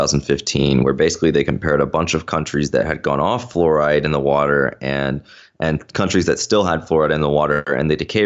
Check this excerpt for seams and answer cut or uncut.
uncut